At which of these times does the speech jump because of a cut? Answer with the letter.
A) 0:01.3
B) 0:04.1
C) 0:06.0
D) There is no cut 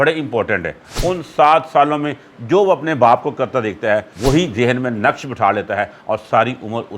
B